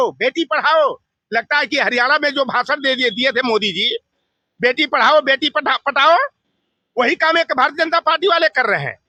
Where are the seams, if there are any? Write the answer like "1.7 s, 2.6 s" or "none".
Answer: none